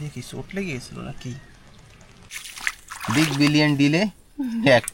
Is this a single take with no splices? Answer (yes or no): no